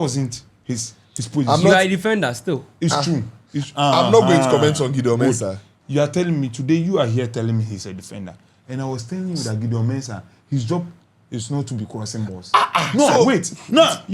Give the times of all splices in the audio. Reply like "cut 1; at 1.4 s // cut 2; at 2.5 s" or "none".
none

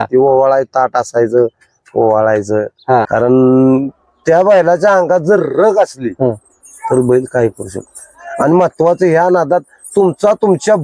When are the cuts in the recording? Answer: cut 1; at 3.1 s

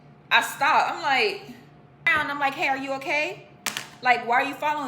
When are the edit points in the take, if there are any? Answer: cut 1; at 2.1 s

